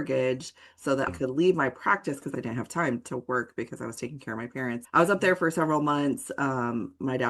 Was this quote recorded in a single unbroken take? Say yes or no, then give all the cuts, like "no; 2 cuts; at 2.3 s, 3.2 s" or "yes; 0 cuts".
no; 3 cuts; at 1.1 s, 2.3 s, 4.8 s